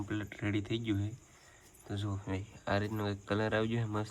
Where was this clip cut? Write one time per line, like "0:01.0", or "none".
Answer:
none

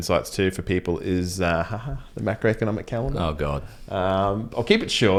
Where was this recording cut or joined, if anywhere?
none

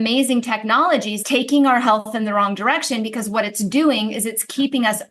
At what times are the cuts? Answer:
0:01.2

